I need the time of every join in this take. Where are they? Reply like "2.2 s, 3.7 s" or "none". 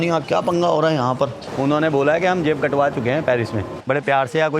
1.4 s, 3.7 s

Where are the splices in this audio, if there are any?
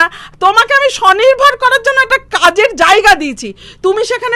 none

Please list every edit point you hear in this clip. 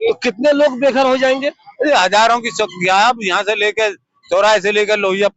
none

